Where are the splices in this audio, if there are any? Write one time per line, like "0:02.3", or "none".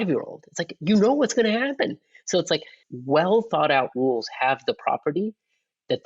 0:02.8